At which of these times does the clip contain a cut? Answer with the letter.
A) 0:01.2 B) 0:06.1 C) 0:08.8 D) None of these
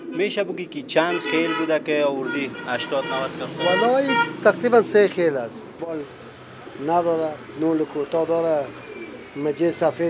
B